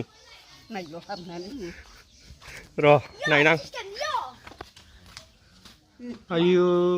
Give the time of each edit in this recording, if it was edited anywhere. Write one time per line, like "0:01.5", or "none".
0:01.5

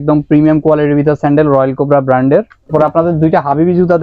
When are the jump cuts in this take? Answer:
0:02.7

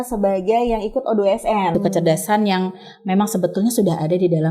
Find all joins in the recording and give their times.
0:01.7

